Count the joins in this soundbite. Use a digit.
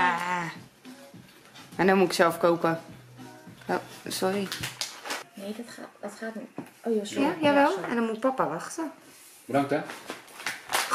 1